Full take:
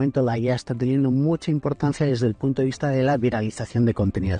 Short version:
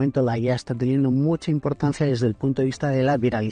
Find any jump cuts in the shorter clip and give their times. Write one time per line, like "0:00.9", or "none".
none